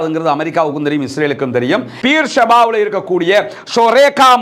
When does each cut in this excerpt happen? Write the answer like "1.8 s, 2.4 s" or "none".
1.9 s